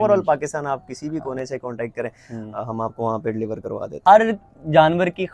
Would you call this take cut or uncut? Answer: cut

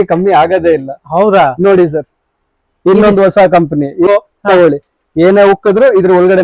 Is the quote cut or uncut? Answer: cut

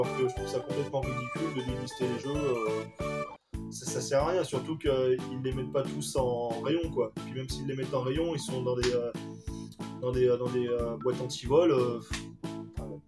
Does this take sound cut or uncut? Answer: cut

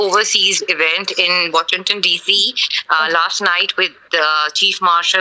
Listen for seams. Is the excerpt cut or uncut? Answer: uncut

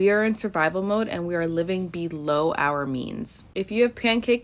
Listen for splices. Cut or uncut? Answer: uncut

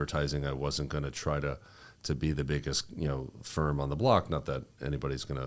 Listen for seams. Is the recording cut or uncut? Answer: uncut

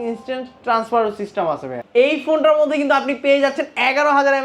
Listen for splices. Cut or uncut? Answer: cut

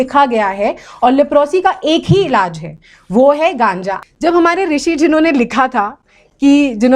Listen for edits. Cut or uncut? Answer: cut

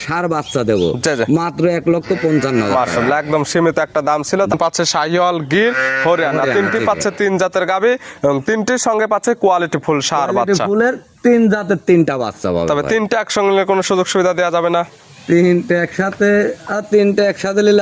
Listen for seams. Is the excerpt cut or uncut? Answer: cut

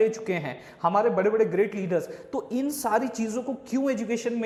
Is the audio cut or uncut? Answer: uncut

